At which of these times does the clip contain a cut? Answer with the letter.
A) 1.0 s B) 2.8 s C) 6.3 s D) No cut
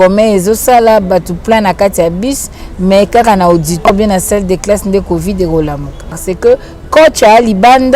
C